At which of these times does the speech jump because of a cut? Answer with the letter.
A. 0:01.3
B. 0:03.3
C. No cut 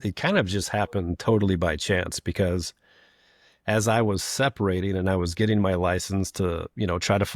C